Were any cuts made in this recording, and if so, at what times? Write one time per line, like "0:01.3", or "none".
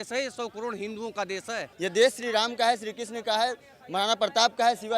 0:01.7